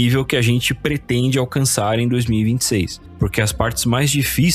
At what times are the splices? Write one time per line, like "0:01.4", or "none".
0:03.1